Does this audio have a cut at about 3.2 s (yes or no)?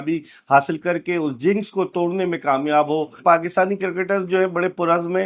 yes